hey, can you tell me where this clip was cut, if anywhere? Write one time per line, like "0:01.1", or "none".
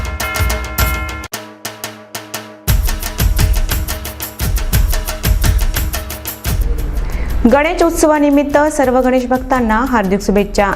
0:01.3
0:06.6